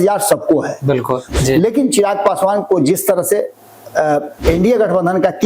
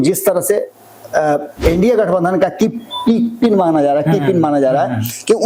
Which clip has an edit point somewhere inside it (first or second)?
first